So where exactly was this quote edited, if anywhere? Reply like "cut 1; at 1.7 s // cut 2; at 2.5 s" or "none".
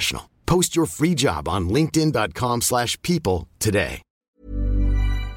cut 1; at 4.2 s